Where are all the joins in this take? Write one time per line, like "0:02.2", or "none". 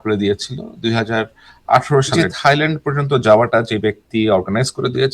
0:02.1

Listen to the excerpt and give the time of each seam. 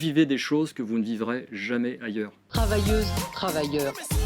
0:02.4

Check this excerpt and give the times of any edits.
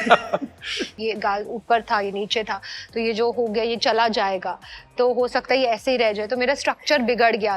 0:00.9

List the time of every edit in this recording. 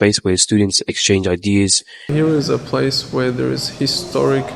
0:02.1

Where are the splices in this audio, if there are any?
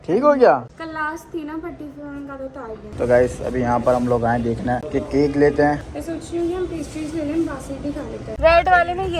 0:03.0
0:08.3

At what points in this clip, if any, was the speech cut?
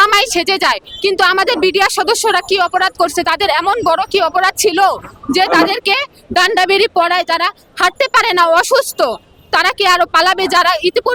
none

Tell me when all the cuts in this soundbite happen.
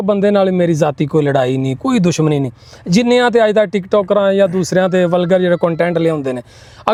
none

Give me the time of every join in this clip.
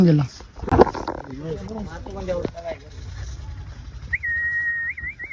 none

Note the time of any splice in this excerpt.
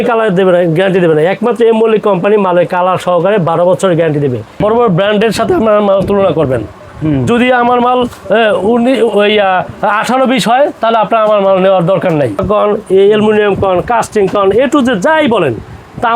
0:04.5
0:12.4

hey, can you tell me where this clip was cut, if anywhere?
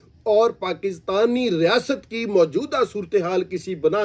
none

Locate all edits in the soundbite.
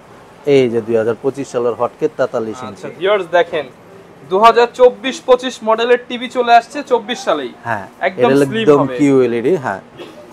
none

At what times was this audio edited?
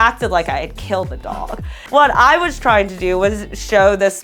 0:01.7

